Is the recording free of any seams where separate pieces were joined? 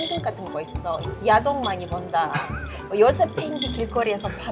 yes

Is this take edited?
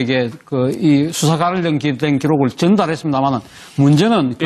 no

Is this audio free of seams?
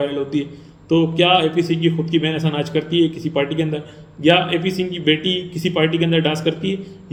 yes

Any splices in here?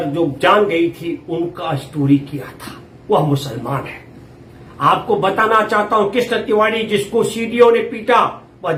no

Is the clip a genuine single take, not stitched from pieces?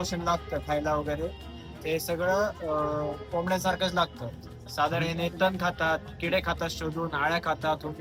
yes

